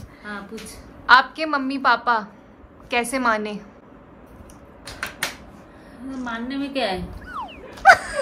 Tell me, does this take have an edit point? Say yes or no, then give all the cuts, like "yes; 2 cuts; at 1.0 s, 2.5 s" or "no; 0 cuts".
no; 0 cuts